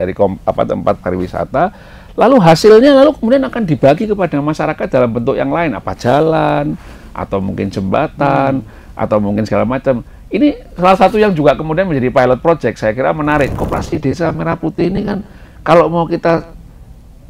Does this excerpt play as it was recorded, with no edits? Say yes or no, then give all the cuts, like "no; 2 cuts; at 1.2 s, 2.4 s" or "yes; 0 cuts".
no; 1 cut; at 13.5 s